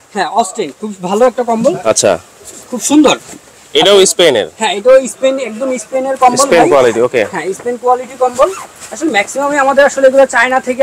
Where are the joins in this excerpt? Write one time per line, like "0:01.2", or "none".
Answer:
none